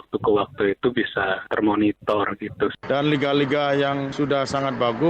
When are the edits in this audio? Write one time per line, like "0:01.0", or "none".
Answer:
0:02.8